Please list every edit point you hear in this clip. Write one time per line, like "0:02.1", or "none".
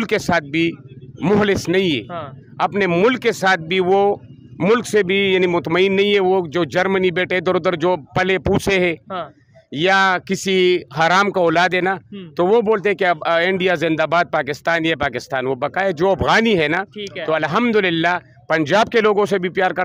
none